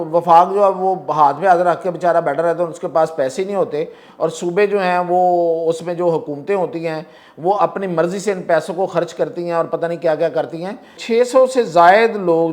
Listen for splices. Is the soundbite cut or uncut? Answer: cut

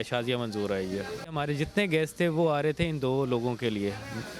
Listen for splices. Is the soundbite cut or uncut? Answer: cut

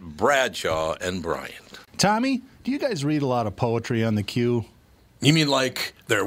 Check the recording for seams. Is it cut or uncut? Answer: cut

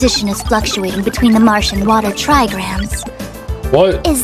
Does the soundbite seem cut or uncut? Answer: uncut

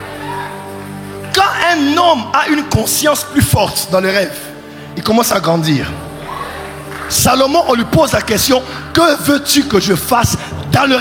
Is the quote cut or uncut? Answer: uncut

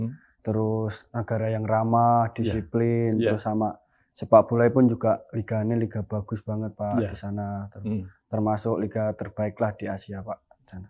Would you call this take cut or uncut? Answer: uncut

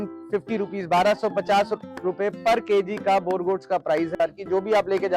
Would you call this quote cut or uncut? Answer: cut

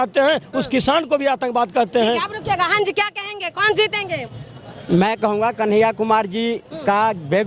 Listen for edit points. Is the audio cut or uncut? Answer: uncut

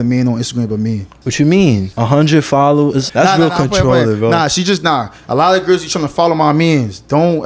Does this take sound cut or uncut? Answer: cut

